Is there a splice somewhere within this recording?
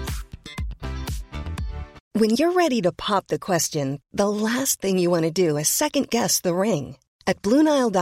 yes; 1 cut; at 2.0 s

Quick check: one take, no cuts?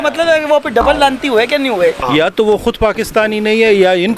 no; 1 cut; at 2.0 s

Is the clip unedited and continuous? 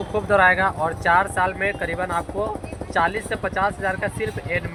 yes; 0 cuts

